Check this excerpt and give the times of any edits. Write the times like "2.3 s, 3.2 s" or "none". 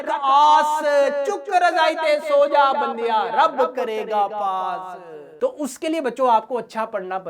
5.2 s